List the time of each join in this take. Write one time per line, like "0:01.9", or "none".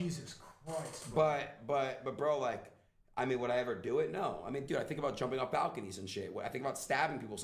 0:00.9
0:02.0